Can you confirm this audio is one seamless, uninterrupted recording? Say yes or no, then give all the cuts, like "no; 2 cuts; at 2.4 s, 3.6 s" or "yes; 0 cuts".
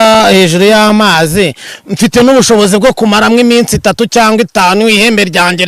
yes; 0 cuts